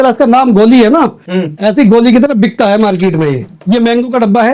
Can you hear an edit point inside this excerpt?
yes; 1 cut; at 3.4 s

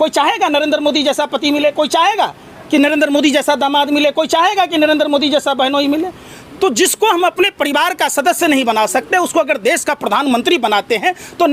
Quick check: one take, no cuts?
yes; 0 cuts

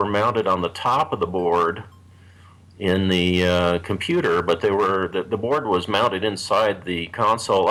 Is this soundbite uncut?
yes; 0 cuts

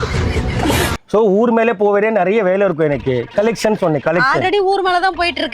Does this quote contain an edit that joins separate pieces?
yes; 1 cut; at 1.0 s

